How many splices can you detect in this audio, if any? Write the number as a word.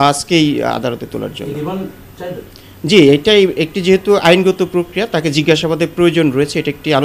zero